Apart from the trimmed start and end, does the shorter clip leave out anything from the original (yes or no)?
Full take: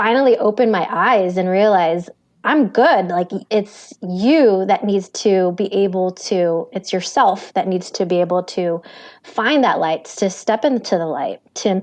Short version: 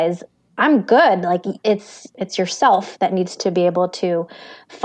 yes